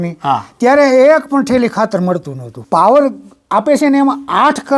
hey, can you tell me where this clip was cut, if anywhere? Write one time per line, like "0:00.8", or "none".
0:02.6